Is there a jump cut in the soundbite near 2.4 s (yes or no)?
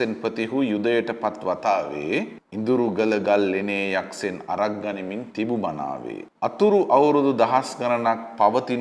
yes